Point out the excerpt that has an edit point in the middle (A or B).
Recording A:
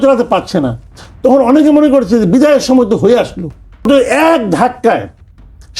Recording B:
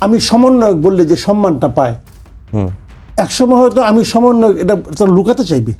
A